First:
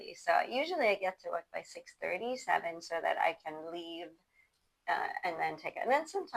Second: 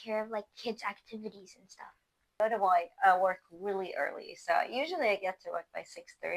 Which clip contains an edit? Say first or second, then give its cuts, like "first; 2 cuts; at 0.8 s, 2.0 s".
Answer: second; 1 cut; at 2.4 s